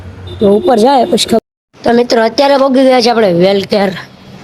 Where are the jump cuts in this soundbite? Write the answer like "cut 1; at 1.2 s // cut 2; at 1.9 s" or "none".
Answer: cut 1; at 1.4 s

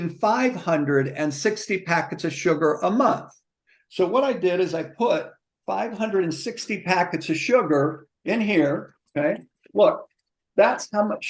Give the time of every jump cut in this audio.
none

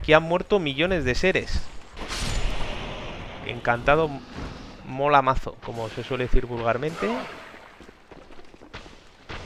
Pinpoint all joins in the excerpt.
cut 1; at 1.9 s

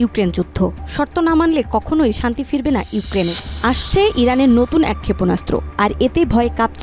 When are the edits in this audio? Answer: cut 1; at 3.4 s

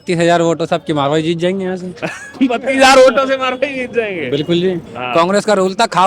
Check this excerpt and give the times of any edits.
cut 1; at 4.9 s

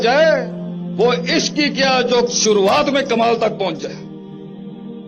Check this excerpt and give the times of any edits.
none

